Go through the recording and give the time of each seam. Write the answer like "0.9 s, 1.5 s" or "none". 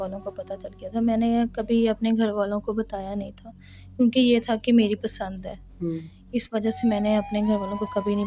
none

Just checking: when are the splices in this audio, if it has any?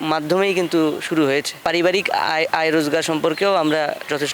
1.6 s

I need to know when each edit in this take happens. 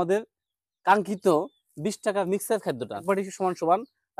3.0 s

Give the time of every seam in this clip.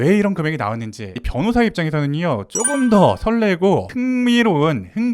1.2 s

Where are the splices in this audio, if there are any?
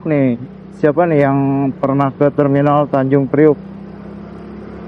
3.6 s

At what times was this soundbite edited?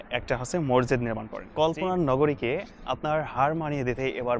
1.4 s

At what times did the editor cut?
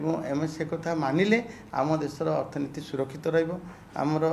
none

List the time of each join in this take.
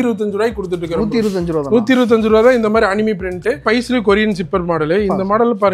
3.6 s

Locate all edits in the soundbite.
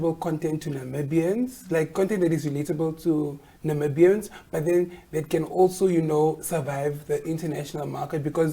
none

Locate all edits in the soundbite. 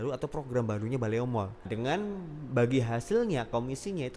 1.6 s

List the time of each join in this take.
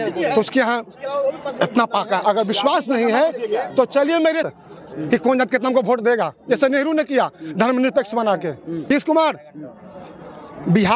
4.4 s, 8.9 s

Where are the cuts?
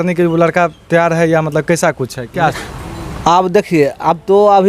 2.6 s

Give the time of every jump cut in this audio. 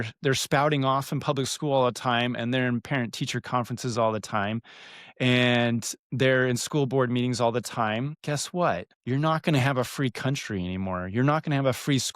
8.2 s, 8.9 s

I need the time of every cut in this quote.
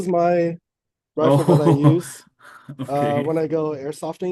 none

